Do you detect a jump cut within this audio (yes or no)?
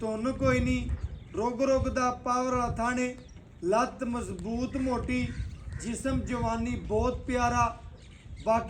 no